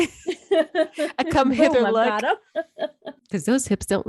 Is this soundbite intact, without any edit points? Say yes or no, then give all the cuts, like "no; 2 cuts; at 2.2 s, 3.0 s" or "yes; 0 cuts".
no; 1 cut; at 3.2 s